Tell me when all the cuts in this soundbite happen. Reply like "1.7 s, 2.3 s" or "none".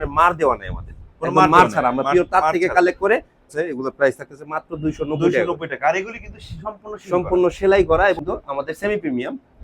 3.5 s, 8.2 s

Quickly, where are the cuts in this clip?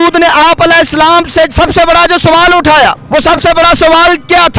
none

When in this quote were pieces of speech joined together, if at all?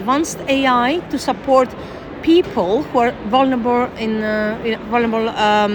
none

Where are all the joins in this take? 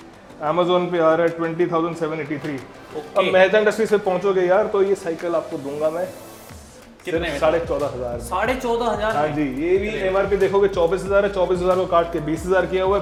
none

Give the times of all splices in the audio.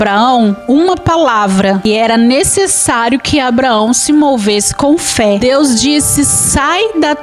1.8 s, 5.4 s

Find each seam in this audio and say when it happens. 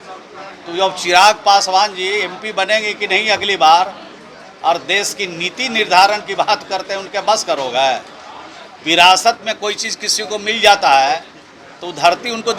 none

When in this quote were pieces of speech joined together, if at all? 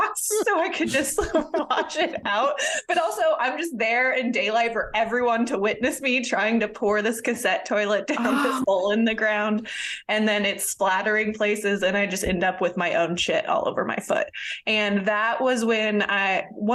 none

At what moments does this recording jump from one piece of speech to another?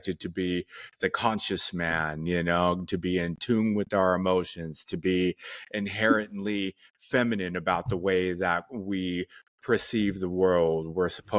none

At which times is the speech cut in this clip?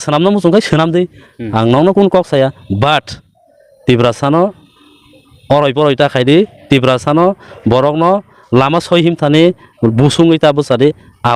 none

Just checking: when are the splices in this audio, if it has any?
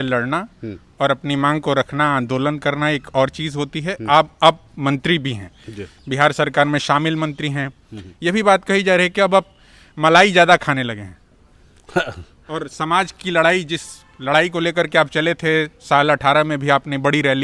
none

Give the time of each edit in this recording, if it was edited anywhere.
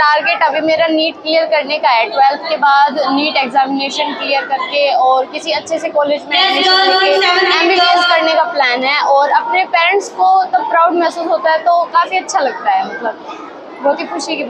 none

